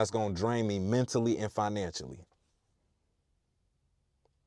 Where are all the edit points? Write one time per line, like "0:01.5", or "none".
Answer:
none